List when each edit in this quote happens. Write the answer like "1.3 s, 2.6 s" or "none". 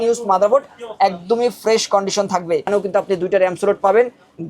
2.7 s